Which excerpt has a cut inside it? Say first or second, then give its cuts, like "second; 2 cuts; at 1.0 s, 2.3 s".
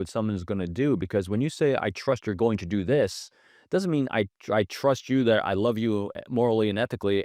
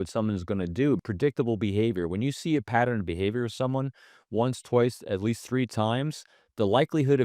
second; 1 cut; at 1.0 s